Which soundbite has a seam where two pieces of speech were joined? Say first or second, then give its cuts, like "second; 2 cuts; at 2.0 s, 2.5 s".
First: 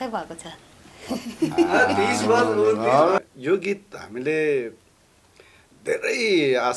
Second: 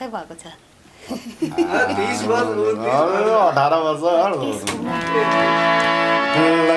first; 1 cut; at 3.2 s